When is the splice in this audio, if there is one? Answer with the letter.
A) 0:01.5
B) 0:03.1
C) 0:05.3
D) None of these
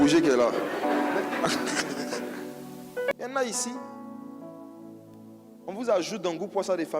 B